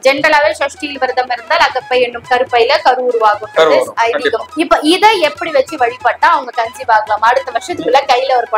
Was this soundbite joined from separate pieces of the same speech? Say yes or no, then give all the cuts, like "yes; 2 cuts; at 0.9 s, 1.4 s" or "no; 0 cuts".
no; 0 cuts